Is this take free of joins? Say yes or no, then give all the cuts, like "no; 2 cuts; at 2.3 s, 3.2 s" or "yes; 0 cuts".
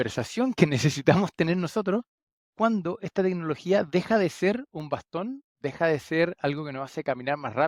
yes; 0 cuts